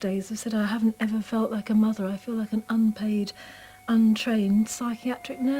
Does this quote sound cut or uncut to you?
uncut